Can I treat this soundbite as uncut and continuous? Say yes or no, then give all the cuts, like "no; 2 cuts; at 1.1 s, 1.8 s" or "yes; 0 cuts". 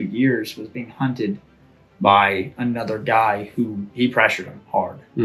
no; 1 cut; at 3.9 s